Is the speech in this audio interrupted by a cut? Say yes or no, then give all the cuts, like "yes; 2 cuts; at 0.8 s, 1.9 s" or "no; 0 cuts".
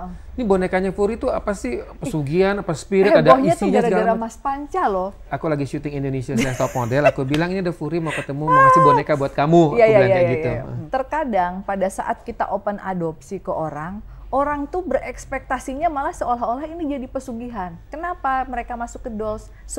yes; 3 cuts; at 5.3 s, 10.7 s, 17.8 s